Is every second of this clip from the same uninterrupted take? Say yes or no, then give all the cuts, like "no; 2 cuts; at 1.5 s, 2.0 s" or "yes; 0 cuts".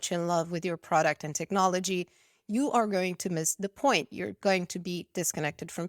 yes; 0 cuts